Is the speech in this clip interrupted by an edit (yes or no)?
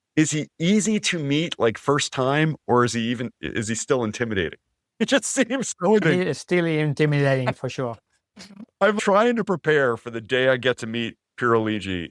yes